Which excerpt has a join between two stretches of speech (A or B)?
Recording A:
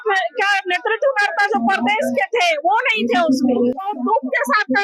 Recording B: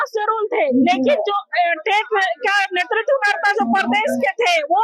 A